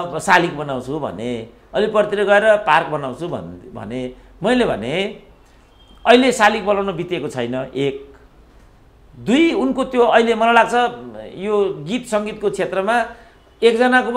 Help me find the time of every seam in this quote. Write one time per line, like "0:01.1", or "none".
none